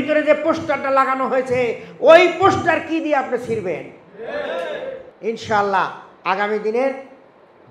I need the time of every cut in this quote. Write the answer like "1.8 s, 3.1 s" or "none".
5.0 s